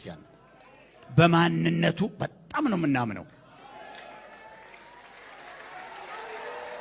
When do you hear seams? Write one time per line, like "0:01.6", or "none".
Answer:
none